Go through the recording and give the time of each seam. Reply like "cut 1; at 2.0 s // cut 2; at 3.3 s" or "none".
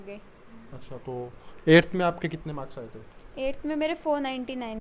none